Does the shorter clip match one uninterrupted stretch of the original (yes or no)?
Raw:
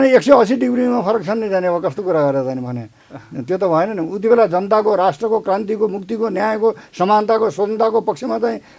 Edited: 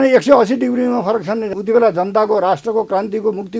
no